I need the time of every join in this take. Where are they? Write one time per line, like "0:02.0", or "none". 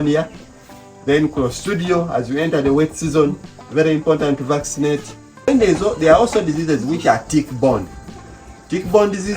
0:05.5